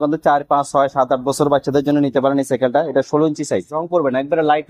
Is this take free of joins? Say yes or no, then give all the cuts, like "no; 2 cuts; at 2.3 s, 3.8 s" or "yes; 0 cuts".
no; 1 cut; at 3.8 s